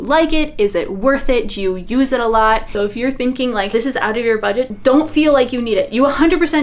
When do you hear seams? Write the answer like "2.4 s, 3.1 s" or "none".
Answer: 2.7 s, 3.7 s, 4.7 s